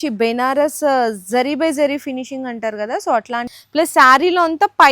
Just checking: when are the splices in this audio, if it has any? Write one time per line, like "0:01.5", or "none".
0:03.5

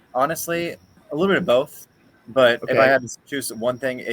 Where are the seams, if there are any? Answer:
0:00.9

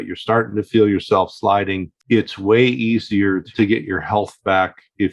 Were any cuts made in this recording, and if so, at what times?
0:01.9
0:03.5

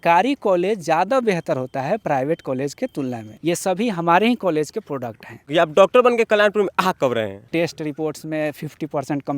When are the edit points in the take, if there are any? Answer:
0:03.3
0:05.5
0:07.4

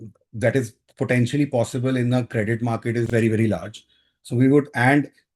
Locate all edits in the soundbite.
0:03.1

